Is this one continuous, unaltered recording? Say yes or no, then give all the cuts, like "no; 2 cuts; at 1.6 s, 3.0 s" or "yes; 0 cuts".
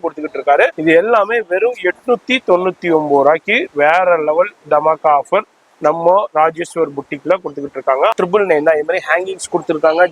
no; 2 cuts; at 0.8 s, 8.1 s